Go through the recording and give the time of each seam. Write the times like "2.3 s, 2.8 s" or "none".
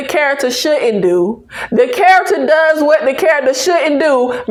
none